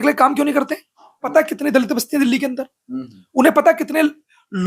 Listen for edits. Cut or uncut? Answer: cut